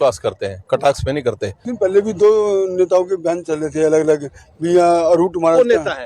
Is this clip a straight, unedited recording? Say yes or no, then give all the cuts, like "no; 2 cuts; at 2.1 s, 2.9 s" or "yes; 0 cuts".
no; 1 cut; at 1.7 s